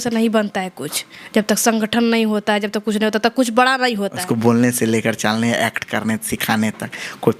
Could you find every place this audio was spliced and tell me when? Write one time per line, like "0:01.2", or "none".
0:04.2